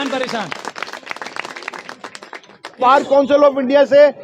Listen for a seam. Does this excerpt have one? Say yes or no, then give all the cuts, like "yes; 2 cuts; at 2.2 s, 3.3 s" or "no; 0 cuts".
yes; 1 cut; at 2.8 s